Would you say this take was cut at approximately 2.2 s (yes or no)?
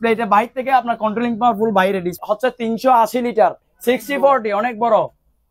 yes